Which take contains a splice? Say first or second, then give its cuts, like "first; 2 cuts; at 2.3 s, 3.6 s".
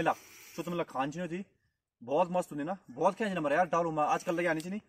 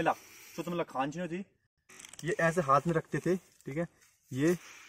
second; 1 cut; at 1.9 s